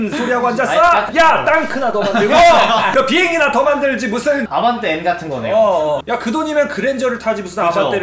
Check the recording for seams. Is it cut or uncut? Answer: cut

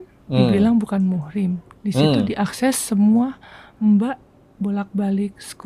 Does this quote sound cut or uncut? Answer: uncut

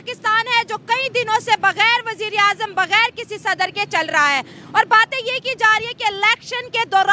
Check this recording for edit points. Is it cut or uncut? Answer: uncut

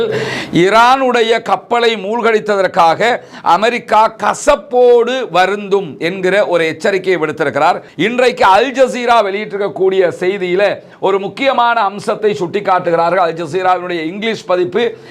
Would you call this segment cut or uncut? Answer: cut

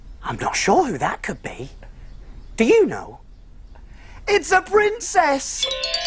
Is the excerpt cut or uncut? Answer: uncut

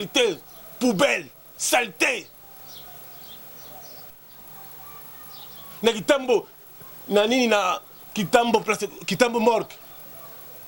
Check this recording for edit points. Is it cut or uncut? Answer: cut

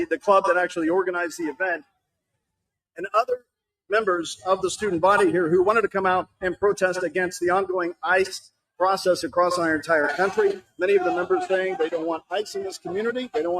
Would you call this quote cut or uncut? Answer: cut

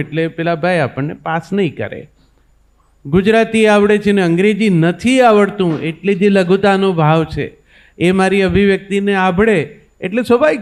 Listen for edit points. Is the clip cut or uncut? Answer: uncut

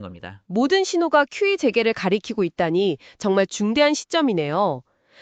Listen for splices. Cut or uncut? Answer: uncut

